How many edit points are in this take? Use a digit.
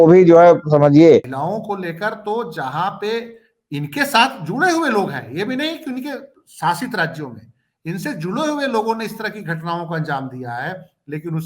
1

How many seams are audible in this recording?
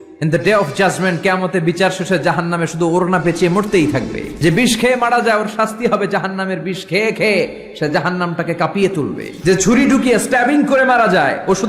2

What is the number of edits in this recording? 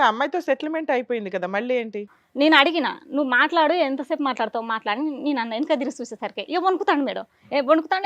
1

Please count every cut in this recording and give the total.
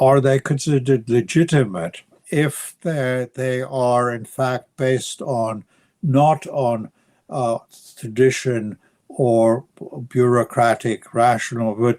1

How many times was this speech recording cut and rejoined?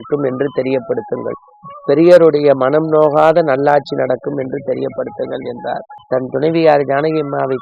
1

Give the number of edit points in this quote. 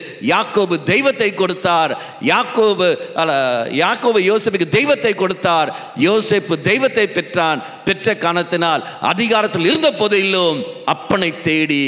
0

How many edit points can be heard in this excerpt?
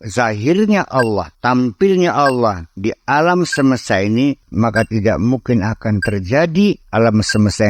3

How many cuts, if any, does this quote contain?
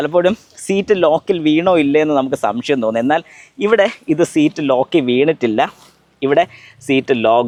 0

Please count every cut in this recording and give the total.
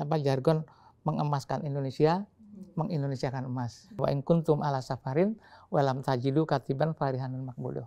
1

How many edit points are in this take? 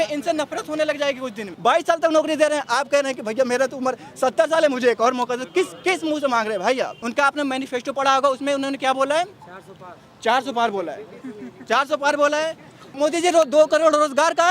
3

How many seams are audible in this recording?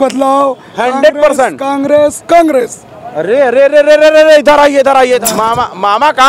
1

